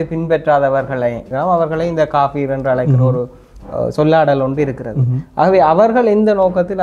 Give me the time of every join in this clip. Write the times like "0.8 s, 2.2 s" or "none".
1.3 s